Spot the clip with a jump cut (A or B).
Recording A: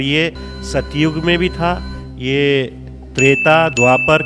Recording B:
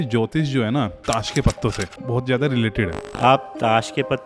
B